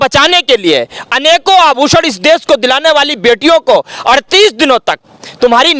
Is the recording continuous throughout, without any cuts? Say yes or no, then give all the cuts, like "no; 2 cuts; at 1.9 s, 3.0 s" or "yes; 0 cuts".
yes; 0 cuts